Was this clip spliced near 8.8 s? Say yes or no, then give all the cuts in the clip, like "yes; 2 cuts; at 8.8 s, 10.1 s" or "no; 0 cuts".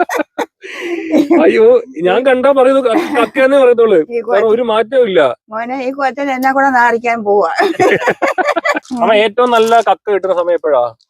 yes; 1 cut; at 8.8 s